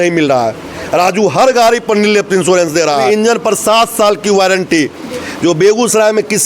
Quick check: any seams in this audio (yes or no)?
yes